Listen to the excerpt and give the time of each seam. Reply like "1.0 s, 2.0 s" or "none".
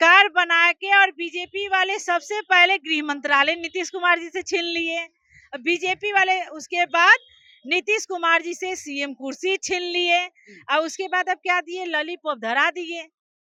none